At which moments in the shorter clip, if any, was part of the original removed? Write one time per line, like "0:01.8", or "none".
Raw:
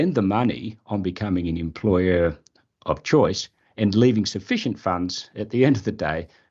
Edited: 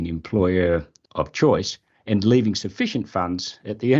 0:01.0